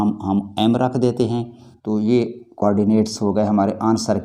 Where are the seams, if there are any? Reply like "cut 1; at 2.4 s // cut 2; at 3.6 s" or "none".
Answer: cut 1; at 1.7 s